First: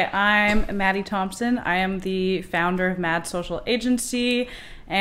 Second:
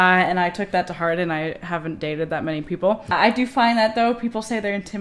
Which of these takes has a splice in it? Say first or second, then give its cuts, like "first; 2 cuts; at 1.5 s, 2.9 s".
second; 1 cut; at 3.1 s